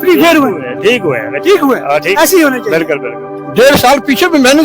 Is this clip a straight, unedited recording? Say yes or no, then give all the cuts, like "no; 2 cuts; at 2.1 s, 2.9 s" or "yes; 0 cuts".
no; 1 cut; at 3.3 s